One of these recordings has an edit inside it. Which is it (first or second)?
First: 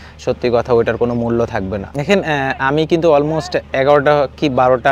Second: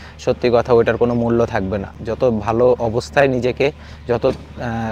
first